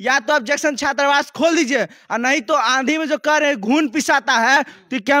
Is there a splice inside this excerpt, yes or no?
no